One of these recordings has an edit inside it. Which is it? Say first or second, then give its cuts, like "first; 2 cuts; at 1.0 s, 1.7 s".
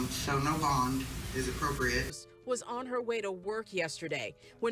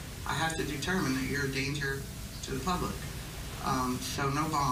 first; 1 cut; at 2.2 s